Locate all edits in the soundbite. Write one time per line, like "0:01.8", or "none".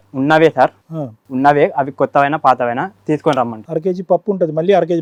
none